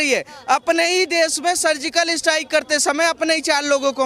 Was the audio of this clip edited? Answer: no; 0 cuts

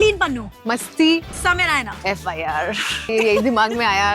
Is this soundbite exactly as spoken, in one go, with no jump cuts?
no; 2 cuts; at 1.9 s, 3.1 s

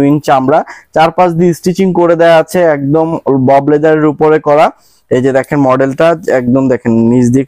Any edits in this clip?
no; 0 cuts

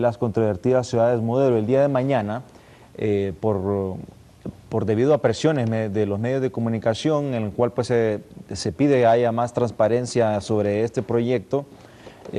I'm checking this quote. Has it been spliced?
no; 0 cuts

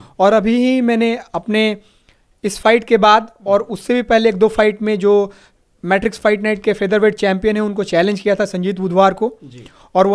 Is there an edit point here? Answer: no; 0 cuts

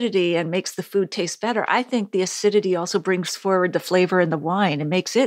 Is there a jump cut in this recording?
no; 0 cuts

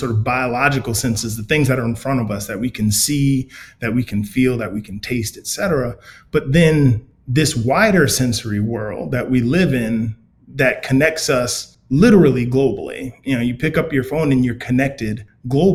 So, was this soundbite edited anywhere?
no; 0 cuts

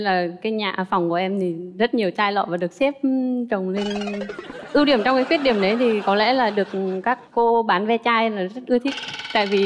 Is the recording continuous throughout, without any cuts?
yes; 0 cuts

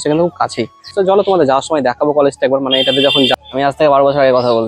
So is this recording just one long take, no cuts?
no; 2 cuts; at 0.9 s, 3.3 s

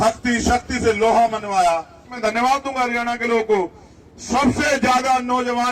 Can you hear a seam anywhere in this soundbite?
yes; 1 cut; at 2.1 s

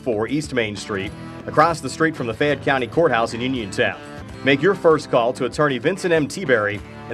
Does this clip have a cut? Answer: no; 0 cuts

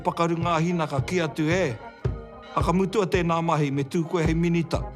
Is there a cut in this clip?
no; 0 cuts

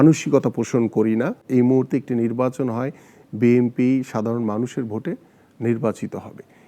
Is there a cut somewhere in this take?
yes; 1 cut; at 1.4 s

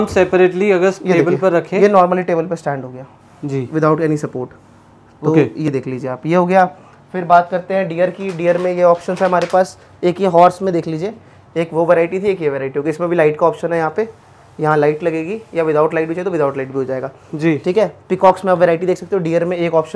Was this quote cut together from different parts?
no; 0 cuts

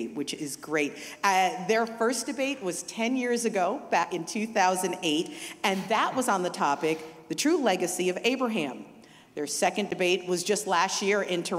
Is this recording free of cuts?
no; 1 cut; at 4.1 s

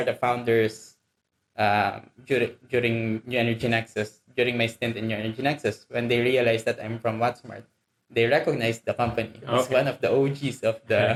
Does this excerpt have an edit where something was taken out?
no; 0 cuts

